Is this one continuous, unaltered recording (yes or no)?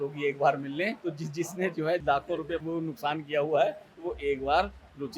no